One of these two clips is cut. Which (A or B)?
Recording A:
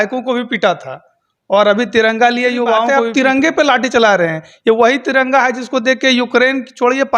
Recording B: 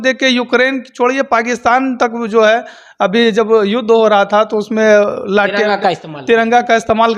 A